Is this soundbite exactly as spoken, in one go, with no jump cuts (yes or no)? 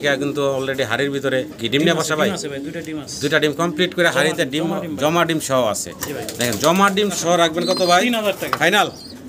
no